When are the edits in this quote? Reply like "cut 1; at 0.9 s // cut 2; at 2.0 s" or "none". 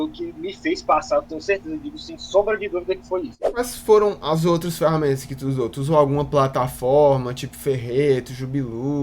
cut 1; at 3.4 s